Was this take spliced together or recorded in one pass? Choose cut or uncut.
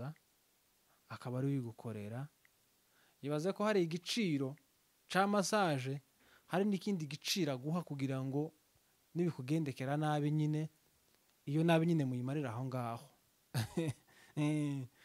uncut